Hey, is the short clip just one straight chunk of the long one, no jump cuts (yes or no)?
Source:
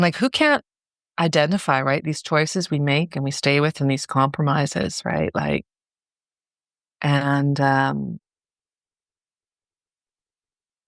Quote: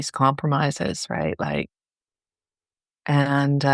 yes